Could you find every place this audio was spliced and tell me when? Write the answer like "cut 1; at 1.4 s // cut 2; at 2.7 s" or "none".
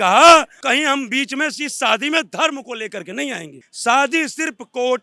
cut 1; at 3.7 s